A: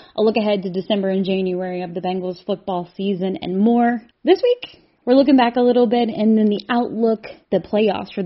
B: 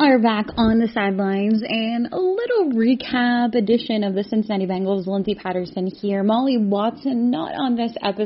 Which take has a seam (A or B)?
A